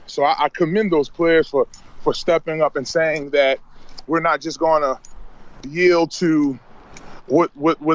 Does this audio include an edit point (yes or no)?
no